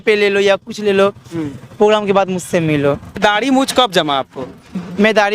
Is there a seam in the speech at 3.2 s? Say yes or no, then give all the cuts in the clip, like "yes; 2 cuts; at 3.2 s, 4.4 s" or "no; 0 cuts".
yes; 1 cut; at 3.2 s